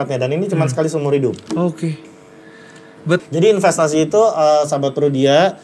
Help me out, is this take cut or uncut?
cut